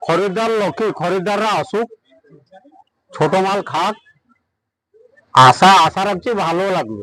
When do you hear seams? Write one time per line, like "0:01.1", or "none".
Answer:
none